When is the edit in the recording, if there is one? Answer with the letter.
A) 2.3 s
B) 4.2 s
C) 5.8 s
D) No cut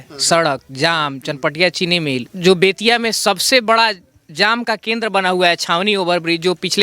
A